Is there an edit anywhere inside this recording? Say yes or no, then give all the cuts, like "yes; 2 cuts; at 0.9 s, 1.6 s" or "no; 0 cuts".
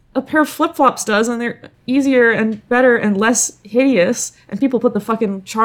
no; 0 cuts